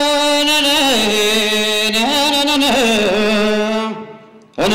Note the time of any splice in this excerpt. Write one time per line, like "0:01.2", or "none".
none